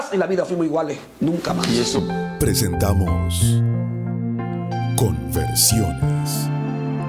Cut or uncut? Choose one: cut